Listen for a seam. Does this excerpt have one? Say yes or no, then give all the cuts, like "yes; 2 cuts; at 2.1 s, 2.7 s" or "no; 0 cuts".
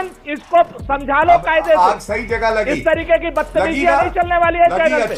no; 0 cuts